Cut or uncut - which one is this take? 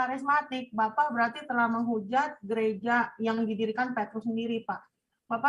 uncut